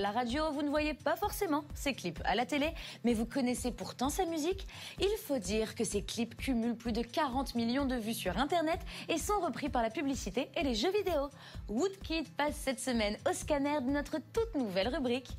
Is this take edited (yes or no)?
yes